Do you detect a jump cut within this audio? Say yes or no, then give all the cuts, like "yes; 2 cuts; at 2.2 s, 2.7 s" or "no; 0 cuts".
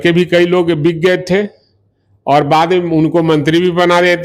no; 0 cuts